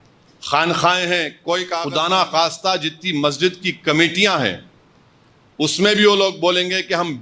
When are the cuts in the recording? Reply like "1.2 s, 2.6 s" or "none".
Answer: 1.8 s